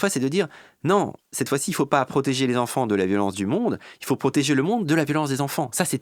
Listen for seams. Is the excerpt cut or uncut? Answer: uncut